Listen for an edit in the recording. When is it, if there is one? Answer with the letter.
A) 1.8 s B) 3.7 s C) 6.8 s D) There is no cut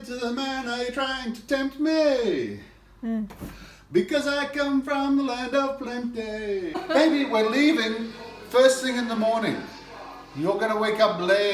C